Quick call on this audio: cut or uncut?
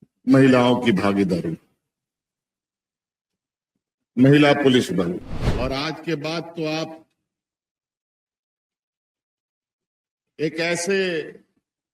cut